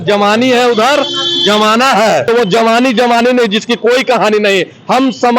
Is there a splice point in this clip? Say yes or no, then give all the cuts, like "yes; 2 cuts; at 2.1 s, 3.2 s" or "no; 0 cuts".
yes; 1 cut; at 2.3 s